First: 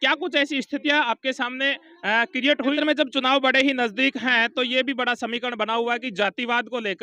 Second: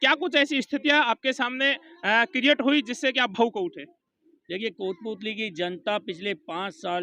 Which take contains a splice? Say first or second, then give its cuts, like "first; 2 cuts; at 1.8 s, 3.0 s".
first; 1 cut; at 2.8 s